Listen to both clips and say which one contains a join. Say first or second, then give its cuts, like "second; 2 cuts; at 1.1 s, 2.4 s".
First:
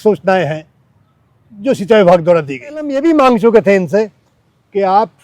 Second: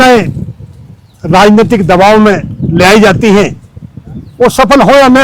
first; 1 cut; at 3.0 s